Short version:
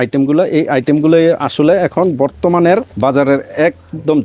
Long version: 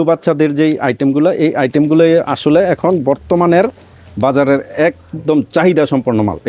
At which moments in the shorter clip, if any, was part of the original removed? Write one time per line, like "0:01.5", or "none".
0:02.9